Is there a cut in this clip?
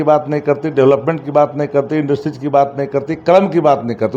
no; 0 cuts

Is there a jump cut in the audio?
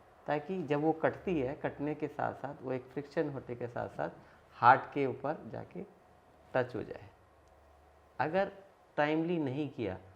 no; 0 cuts

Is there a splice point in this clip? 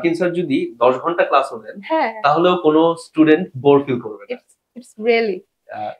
no; 0 cuts

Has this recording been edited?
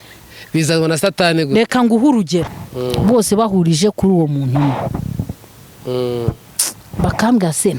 yes; 1 cut; at 2.5 s

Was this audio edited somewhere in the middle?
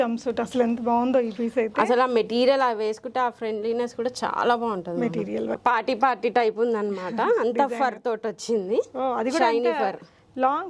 yes; 1 cut; at 5.5 s

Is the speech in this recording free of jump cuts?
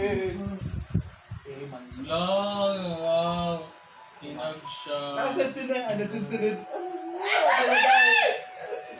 yes; 0 cuts

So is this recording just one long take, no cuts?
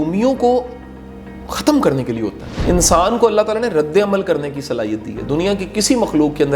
no; 1 cut; at 2.6 s

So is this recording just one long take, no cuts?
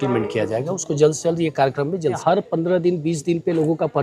no; 1 cut; at 2.2 s

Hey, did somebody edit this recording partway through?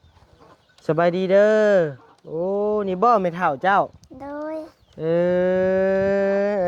no; 0 cuts

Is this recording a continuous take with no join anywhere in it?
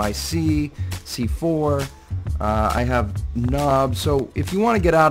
yes; 0 cuts

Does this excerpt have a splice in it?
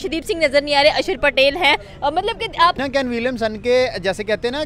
yes; 1 cut; at 2.8 s

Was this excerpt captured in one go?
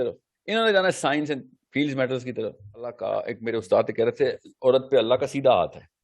no; 1 cut; at 3.0 s

